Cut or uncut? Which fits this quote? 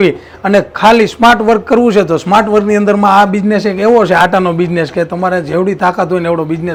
uncut